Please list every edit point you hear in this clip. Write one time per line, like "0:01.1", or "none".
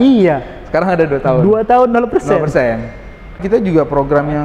0:03.4